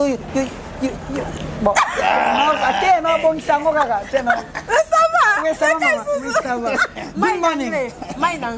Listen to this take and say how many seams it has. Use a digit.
0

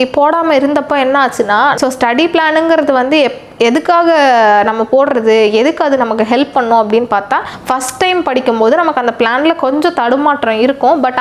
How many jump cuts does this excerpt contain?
2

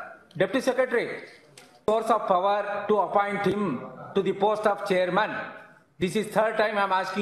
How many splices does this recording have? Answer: 1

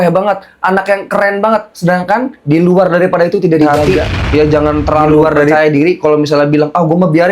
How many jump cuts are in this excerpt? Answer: 1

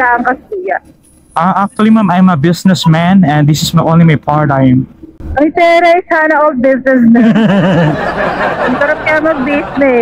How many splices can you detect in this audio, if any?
0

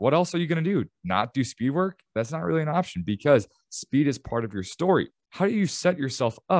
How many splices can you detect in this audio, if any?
1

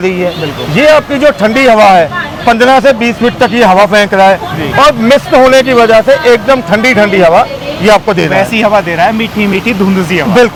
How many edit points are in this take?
0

